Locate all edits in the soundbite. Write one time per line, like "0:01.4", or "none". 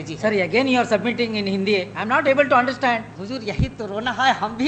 0:03.1